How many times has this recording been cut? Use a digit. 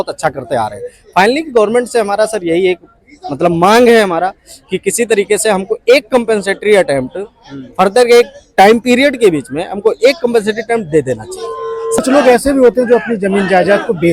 1